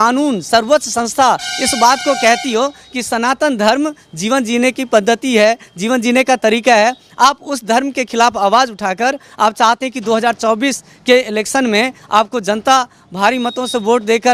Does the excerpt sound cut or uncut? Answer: uncut